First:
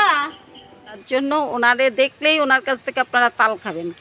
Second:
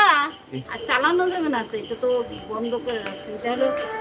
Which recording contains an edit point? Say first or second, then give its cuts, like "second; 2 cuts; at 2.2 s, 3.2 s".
first; 1 cut; at 0.9 s